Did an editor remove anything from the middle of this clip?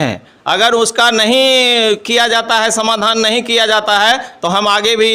no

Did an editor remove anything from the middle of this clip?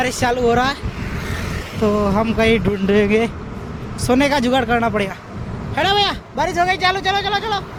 no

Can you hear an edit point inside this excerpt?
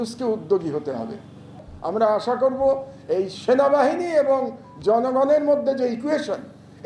yes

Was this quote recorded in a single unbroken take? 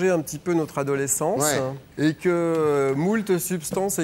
no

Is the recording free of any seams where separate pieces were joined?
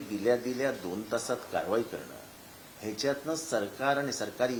yes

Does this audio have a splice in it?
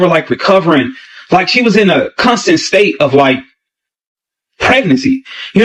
no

